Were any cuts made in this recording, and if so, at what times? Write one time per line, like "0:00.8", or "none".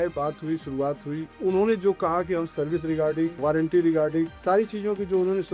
0:01.3
0:03.4
0:04.4